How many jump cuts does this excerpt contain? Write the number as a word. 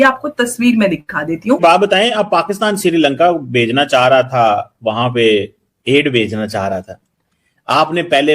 one